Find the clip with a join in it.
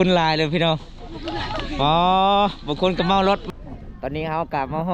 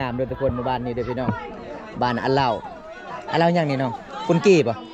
first; 1 cut; at 3.4 s

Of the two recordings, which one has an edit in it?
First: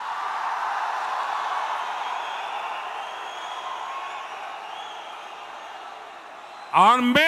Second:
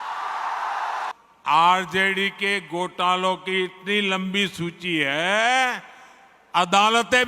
second; 1 cut; at 1.1 s

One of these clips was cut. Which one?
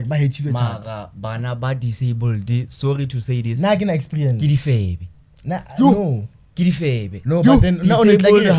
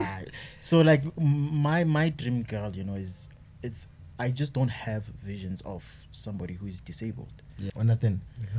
second; 1 cut; at 7.7 s

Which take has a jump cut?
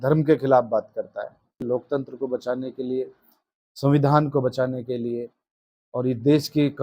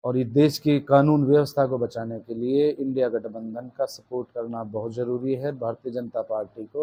first; 1 cut; at 1.6 s

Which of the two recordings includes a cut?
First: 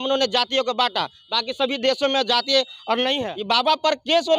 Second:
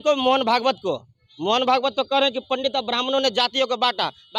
first; 1 cut; at 3.2 s

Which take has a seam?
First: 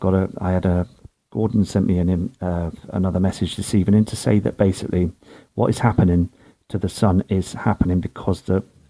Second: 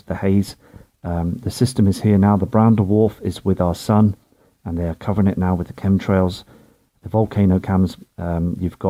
first; 1 cut; at 3.4 s

